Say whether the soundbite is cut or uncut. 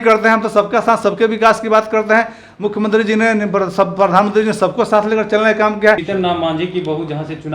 cut